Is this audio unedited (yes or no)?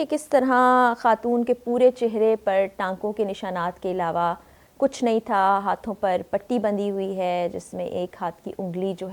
yes